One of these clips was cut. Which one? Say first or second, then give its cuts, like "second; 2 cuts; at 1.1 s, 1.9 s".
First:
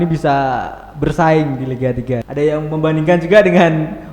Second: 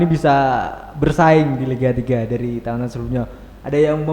first; 1 cut; at 2.2 s